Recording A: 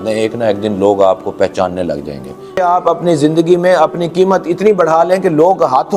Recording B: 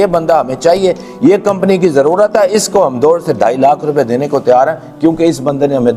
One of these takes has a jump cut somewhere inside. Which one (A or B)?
A